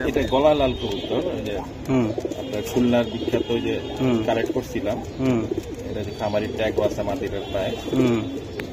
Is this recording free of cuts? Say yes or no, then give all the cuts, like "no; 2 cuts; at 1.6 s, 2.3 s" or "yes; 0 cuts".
yes; 0 cuts